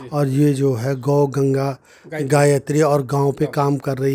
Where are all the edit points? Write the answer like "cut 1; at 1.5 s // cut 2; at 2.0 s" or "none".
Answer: none